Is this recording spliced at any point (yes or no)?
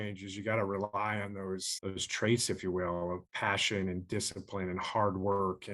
yes